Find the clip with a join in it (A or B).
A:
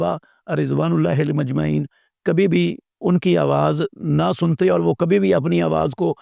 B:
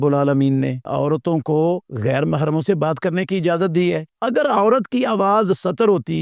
B